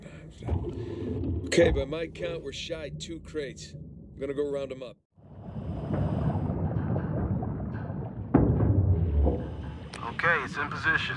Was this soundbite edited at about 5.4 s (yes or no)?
yes